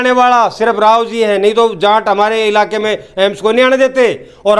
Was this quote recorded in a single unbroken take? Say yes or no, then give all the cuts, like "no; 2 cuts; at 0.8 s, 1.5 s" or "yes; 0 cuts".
yes; 0 cuts